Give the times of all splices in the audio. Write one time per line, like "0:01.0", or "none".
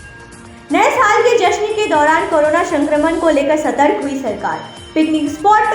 none